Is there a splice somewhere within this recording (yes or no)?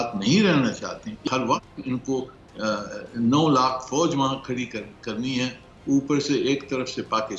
yes